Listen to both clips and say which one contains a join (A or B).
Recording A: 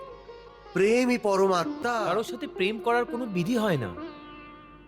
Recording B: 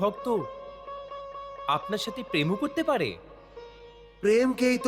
A